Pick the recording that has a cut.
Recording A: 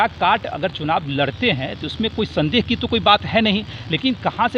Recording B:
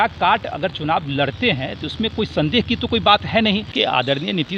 B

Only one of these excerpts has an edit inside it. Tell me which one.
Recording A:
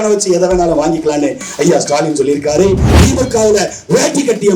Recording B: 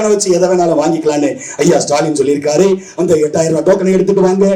A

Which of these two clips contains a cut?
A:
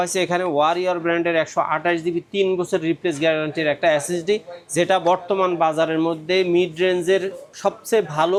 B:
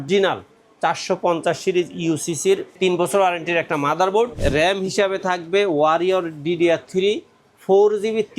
B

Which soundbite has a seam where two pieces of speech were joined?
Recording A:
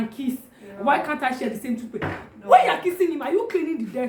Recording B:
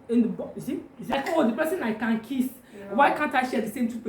B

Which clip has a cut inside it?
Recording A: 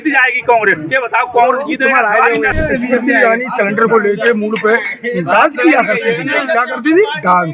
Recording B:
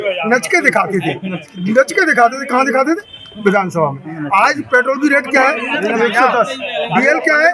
A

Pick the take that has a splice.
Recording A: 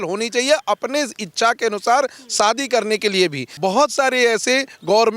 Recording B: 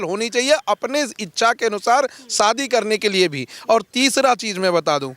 A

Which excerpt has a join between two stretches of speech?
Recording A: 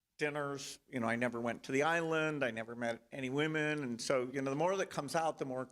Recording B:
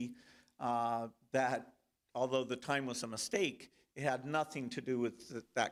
A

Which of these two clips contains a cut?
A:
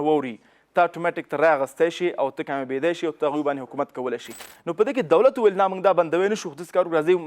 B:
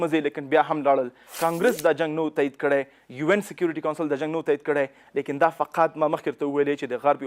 A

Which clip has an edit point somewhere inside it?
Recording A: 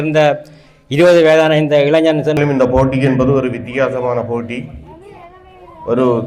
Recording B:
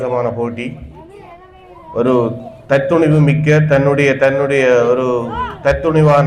A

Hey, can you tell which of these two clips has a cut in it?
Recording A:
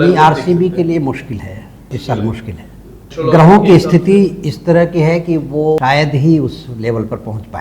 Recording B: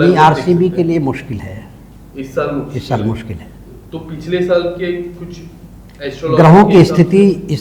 A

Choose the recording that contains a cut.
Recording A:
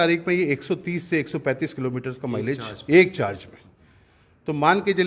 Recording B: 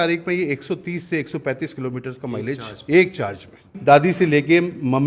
B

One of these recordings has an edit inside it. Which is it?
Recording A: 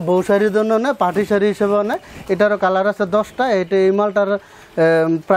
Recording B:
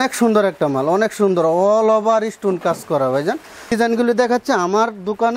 B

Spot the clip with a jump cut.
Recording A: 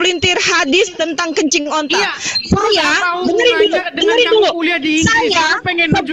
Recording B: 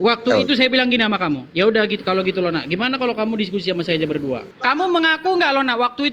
B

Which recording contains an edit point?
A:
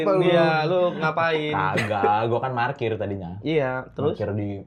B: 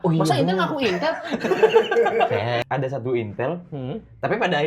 B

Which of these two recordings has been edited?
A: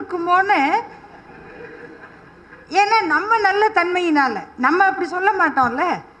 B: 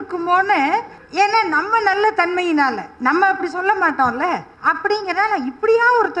B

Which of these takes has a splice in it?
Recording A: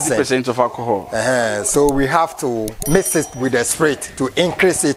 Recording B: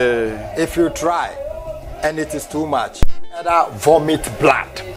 A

